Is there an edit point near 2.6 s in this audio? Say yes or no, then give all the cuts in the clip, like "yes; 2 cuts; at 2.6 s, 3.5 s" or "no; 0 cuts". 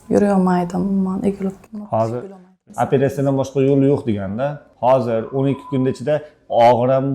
yes; 1 cut; at 2.6 s